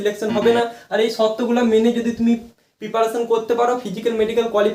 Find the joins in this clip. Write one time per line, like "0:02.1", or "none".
none